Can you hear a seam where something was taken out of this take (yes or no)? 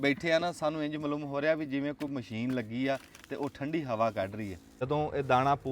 yes